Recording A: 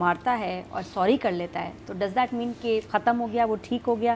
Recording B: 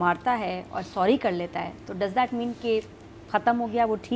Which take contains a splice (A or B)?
A